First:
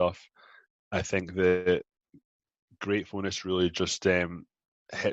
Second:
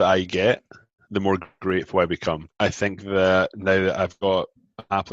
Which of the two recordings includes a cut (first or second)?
second